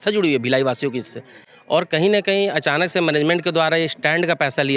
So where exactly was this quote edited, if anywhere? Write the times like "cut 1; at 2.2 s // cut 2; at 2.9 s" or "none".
none